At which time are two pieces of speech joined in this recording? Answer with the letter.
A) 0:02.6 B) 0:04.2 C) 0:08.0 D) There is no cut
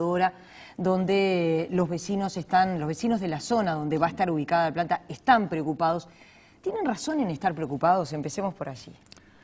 D